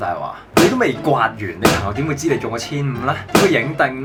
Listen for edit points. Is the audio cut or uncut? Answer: uncut